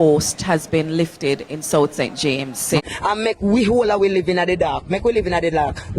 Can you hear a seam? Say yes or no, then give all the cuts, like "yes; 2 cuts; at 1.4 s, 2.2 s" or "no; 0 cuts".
yes; 1 cut; at 2.8 s